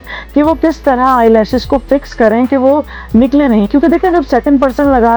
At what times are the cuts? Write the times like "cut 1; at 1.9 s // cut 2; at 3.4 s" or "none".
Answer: none